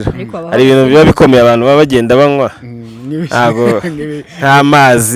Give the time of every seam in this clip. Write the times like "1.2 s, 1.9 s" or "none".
none

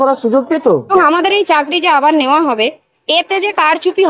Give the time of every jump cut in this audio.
0.9 s

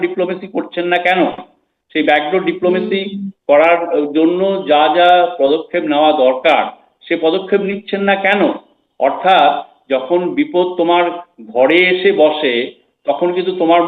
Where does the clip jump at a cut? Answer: none

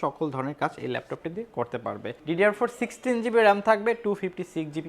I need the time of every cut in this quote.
2.1 s

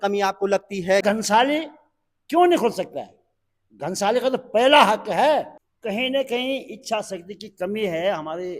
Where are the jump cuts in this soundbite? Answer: 1.0 s, 5.6 s

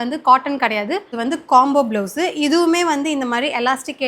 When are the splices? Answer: 1.1 s

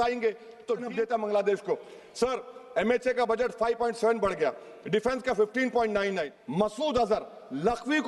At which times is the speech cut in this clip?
0.9 s, 6.3 s

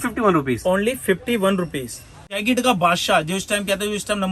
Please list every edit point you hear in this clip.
2.4 s

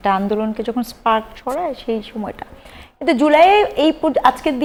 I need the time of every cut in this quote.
none

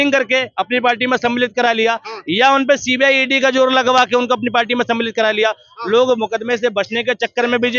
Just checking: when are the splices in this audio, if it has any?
none

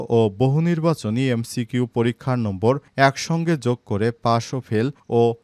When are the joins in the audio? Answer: none

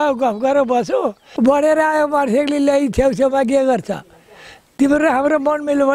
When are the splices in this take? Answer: 1.2 s

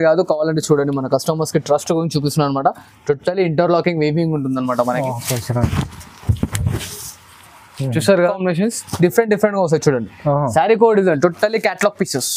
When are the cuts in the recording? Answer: 8.3 s

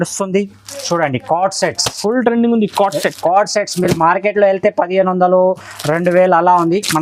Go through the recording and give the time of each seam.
none

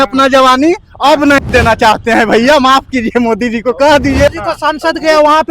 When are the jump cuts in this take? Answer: 4.3 s

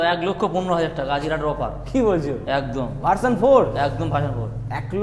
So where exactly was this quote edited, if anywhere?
none

